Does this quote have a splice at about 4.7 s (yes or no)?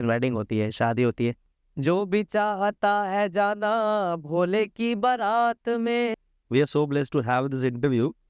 no